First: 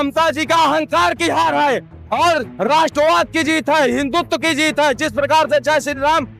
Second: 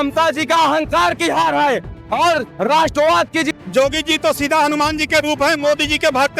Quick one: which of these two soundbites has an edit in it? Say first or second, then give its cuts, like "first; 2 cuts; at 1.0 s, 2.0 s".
second; 1 cut; at 3.5 s